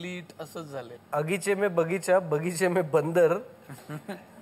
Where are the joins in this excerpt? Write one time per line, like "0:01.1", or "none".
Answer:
0:01.0